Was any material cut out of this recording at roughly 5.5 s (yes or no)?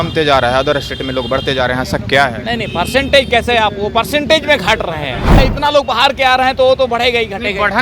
yes